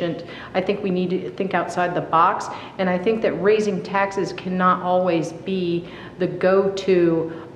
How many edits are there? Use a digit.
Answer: 0